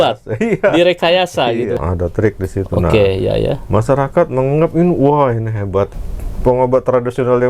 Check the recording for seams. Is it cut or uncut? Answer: cut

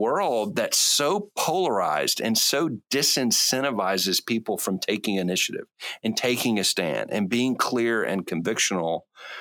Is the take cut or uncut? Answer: uncut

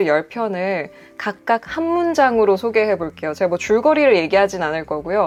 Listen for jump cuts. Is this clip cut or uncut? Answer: uncut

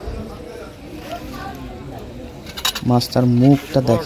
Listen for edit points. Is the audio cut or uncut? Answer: uncut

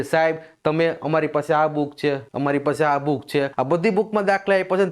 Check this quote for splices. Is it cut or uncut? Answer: cut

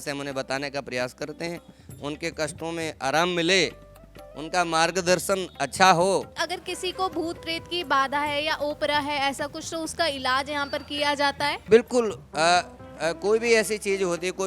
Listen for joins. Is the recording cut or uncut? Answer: cut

